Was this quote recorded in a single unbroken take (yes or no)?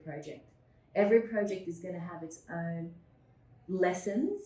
yes